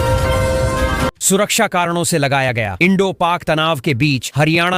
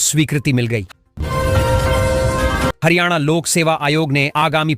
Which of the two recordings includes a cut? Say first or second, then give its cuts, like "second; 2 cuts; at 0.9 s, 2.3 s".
first; 1 cut; at 1.1 s